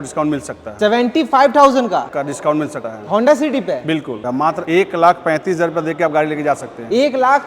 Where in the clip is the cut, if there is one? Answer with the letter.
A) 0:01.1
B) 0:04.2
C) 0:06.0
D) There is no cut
B